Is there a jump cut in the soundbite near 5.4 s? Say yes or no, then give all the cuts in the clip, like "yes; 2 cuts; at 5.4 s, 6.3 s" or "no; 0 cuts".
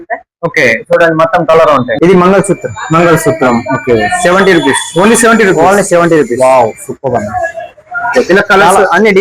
no; 1 cut; at 1.9 s